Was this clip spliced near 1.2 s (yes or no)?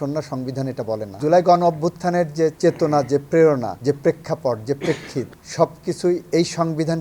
yes